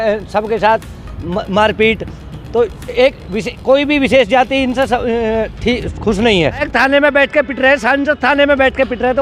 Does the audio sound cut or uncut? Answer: cut